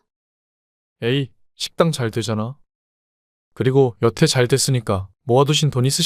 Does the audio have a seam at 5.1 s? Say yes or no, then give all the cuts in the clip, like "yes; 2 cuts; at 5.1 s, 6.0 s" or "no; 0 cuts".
yes; 1 cut; at 5.1 s